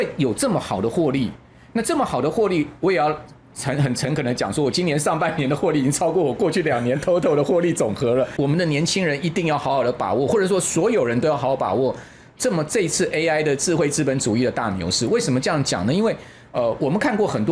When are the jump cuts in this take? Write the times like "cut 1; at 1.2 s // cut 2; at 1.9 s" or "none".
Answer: cut 1; at 8.3 s